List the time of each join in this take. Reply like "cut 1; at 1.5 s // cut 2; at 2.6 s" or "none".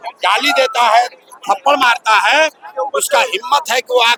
none